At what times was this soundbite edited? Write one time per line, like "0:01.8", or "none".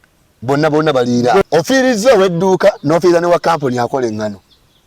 0:01.4